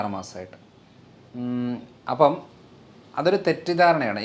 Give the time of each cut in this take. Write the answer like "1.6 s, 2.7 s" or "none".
none